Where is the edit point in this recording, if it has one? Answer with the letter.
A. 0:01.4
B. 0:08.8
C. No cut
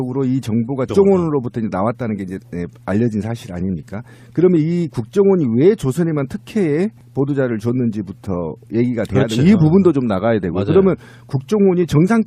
B